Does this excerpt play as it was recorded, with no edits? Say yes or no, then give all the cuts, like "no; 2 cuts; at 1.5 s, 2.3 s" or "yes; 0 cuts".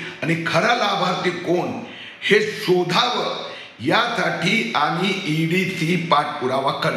yes; 0 cuts